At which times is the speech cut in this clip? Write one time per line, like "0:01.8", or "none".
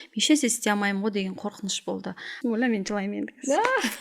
0:02.3